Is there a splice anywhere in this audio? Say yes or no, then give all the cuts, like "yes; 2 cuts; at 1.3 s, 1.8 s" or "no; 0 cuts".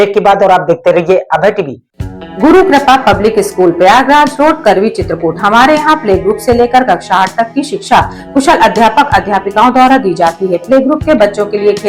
yes; 1 cut; at 1.7 s